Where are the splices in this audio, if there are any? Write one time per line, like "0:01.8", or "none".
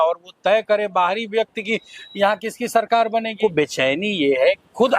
0:03.4